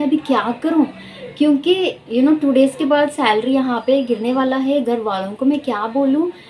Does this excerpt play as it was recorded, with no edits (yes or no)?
yes